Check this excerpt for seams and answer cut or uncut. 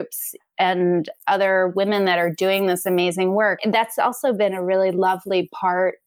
cut